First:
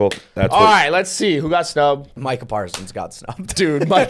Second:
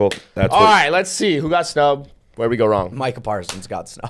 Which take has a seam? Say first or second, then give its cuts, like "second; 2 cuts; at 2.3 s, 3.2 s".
first; 1 cut; at 2.2 s